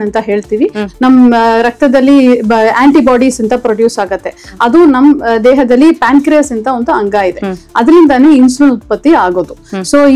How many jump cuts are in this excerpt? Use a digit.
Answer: 0